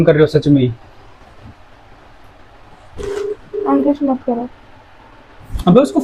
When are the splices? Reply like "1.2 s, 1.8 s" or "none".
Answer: none